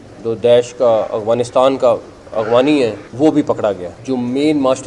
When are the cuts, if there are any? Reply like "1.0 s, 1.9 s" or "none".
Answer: 3.0 s, 3.9 s